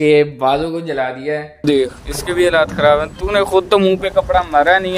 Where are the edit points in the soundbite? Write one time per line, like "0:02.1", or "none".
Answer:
0:01.6